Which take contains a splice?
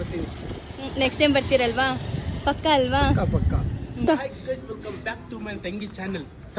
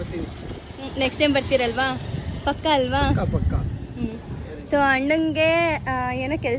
first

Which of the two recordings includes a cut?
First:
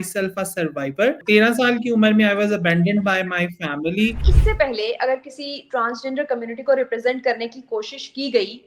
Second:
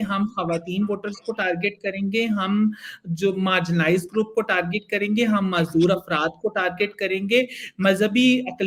first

